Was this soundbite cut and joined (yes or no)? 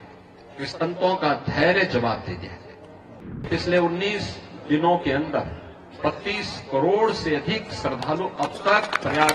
yes